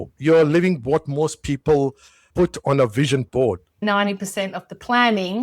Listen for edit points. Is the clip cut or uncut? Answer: cut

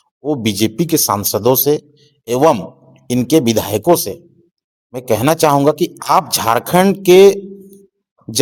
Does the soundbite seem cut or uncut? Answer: uncut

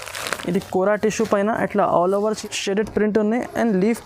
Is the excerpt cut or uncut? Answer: cut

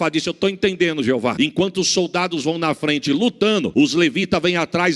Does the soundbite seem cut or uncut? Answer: cut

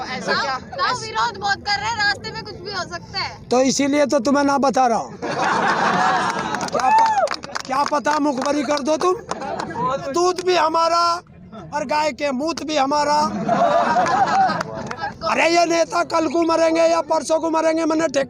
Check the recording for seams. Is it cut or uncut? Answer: cut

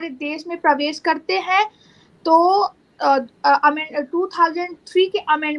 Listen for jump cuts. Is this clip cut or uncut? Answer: uncut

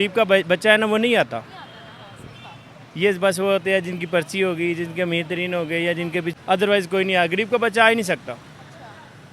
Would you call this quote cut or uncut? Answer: cut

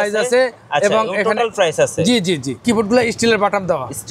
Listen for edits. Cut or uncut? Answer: cut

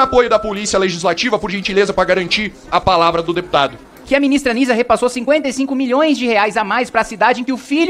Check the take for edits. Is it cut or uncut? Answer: cut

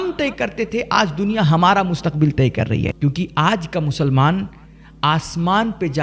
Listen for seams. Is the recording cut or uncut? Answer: cut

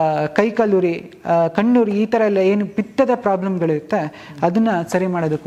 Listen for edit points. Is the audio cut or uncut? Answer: uncut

